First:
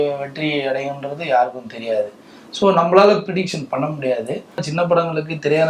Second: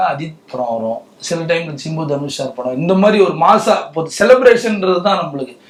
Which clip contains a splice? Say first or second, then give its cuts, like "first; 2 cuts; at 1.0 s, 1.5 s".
first; 1 cut; at 4.7 s